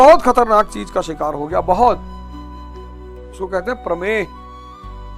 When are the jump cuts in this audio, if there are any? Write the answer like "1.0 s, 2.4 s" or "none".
2.0 s, 3.4 s, 4.3 s